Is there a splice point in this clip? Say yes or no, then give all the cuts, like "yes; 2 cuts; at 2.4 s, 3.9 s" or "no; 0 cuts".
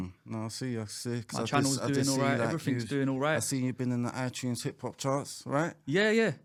no; 0 cuts